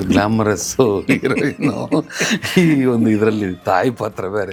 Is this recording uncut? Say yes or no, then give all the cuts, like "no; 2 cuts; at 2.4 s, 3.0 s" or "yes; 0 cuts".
yes; 0 cuts